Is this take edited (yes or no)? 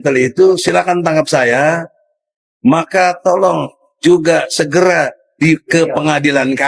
no